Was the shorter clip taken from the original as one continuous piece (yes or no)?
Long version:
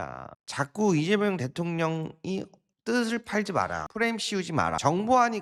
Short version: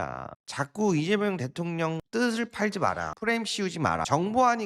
no